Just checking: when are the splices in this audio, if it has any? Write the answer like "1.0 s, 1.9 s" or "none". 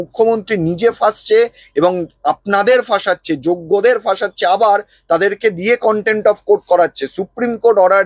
none